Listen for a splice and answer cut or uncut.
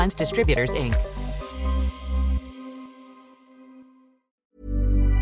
cut